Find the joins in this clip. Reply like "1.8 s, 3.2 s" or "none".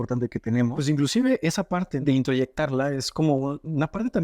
0.8 s, 1.9 s